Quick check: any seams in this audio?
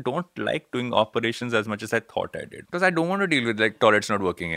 yes; 1 cut; at 2.5 s

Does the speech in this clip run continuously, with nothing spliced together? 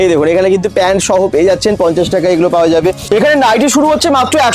no; 1 cut; at 3.0 s

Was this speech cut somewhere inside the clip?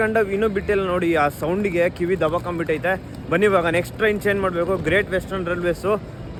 no; 0 cuts

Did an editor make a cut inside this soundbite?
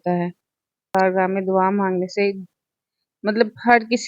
yes; 1 cut; at 0.9 s

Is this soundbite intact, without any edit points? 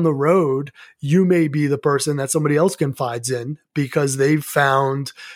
yes; 0 cuts

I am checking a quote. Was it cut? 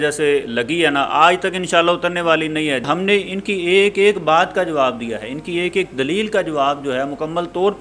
yes; 1 cut; at 2.9 s

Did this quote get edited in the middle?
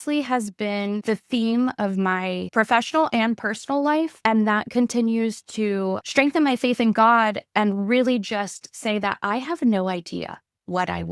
yes; 4 cuts; at 1.0 s, 2.4 s, 4.2 s, 6.0 s

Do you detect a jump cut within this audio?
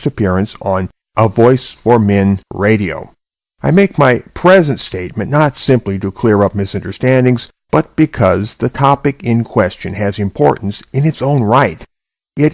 no; 0 cuts

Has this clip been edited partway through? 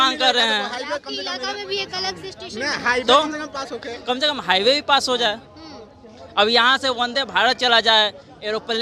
no; 0 cuts

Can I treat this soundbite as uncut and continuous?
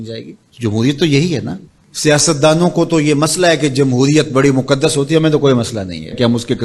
no; 1 cut; at 1.6 s

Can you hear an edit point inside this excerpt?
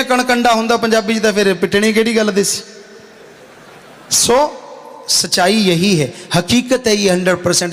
no; 0 cuts

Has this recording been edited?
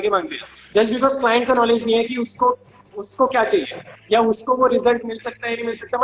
no; 0 cuts

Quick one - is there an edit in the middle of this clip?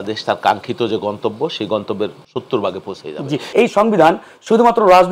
yes; 2 cuts; at 2.2 s, 3.5 s

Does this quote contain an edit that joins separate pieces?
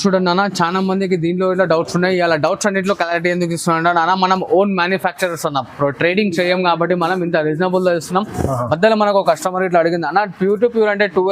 no; 0 cuts

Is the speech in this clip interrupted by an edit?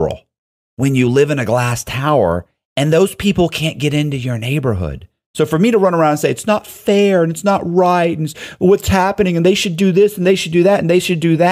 no; 0 cuts

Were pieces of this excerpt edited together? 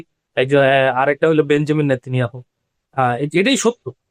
no; 0 cuts

